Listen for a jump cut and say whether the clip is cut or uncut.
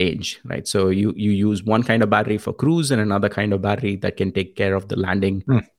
uncut